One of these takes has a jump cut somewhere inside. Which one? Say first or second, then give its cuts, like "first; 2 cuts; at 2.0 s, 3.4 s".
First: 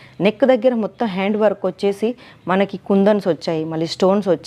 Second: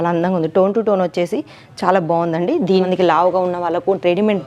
second; 1 cut; at 2.8 s